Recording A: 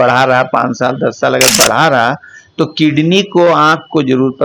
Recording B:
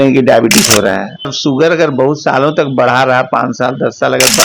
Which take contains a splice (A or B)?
B